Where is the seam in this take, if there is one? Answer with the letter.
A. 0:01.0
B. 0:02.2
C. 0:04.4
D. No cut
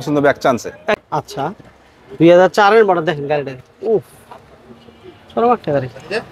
A